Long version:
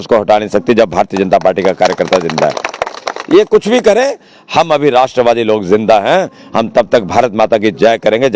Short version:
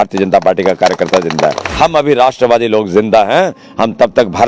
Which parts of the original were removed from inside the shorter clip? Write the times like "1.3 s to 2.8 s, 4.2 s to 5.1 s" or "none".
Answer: 2.6 s to 4.4 s